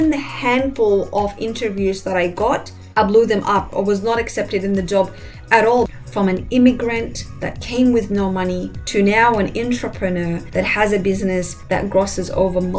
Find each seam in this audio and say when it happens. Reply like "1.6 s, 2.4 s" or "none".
5.9 s, 8.7 s, 10.4 s, 11.5 s

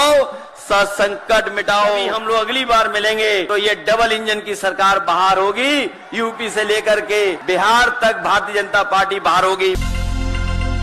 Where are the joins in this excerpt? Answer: 2.0 s, 3.5 s, 7.4 s

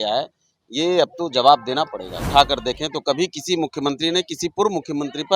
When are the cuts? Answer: 2.1 s

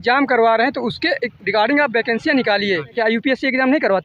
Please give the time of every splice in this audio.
2.9 s

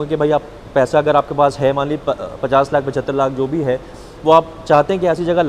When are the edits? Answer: none

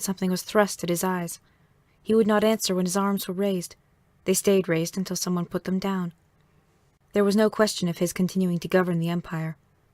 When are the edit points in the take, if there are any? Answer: 3.1 s

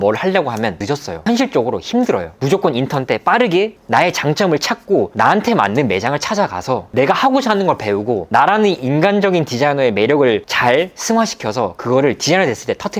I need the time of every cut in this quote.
0.8 s, 2.3 s, 3.7 s, 5.1 s

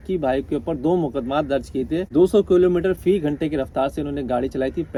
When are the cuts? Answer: none

